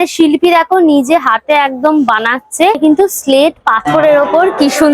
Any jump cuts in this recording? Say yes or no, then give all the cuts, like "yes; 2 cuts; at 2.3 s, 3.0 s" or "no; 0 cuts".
yes; 1 cut; at 2.8 s